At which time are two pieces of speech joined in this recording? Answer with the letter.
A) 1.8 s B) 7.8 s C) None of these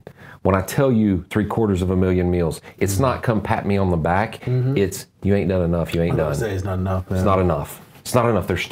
C